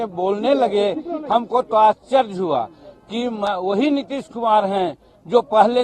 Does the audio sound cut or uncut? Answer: uncut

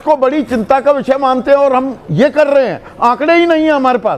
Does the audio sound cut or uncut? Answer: uncut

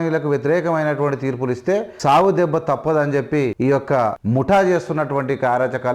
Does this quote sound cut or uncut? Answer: cut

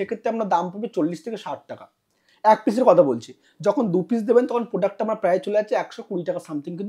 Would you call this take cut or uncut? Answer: uncut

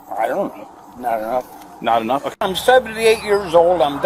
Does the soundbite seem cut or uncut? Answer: cut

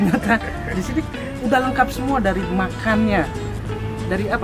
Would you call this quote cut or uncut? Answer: uncut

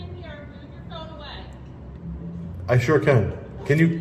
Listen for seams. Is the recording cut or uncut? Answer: uncut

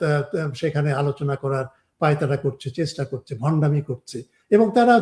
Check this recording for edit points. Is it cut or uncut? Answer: uncut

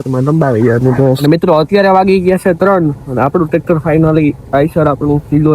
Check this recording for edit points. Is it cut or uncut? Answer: cut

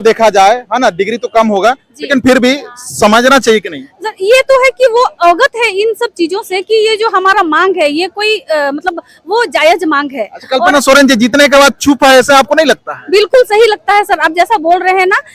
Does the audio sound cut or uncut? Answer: uncut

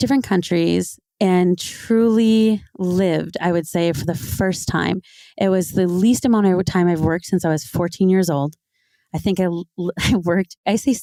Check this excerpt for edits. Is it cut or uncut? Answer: uncut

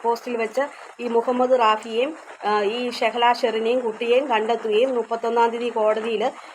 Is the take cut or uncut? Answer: uncut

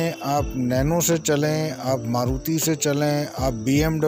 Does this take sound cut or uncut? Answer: uncut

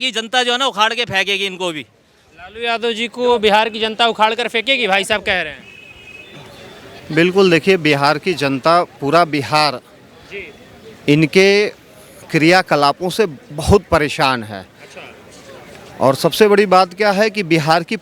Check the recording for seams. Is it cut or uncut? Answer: uncut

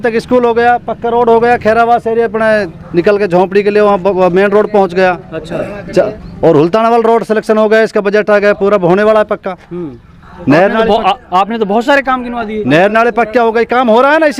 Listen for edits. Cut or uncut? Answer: uncut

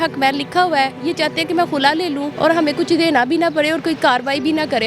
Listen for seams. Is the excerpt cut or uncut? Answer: cut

